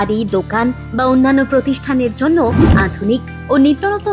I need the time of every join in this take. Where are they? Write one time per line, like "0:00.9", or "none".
none